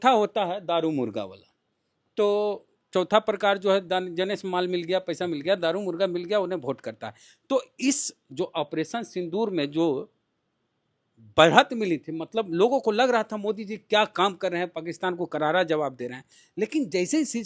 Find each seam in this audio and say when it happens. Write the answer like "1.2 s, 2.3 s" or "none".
none